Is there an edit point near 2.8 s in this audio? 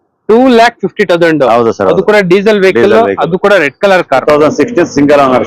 no; 1 cut; at 4.2 s

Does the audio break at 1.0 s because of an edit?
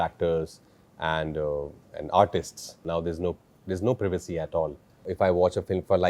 no; 2 cuts; at 2.8 s, 5.0 s

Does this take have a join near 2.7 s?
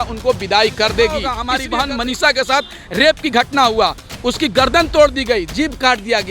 no; 1 cut; at 1.4 s

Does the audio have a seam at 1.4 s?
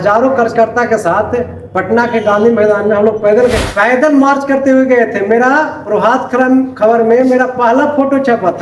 no; 1 cut; at 3.6 s

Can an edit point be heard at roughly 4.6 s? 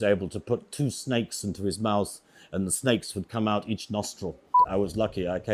yes; 1 cut; at 4.6 s

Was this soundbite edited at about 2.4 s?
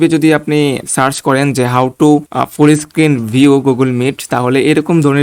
yes; 2 cuts; at 0.8 s, 2.4 s

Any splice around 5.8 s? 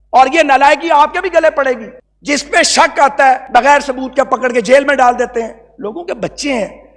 no; 0 cuts

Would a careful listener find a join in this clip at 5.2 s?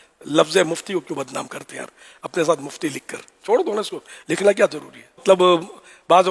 yes; 1 cut; at 5.2 s

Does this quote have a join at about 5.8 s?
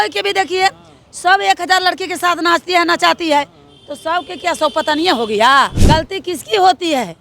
yes; 1 cut; at 5.8 s

